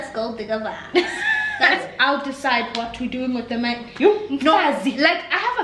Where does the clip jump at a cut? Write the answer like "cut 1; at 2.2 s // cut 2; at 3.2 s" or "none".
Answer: cut 1; at 1.8 s